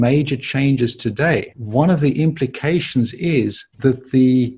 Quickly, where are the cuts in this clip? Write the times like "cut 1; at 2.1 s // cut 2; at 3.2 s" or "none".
cut 1; at 1.6 s // cut 2; at 3.6 s